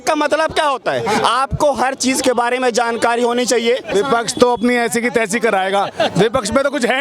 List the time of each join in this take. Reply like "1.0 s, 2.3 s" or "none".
3.9 s